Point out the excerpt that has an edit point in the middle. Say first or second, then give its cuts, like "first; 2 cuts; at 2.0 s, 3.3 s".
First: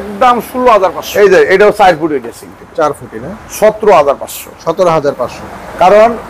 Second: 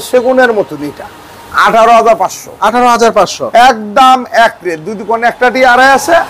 first; 1 cut; at 1.0 s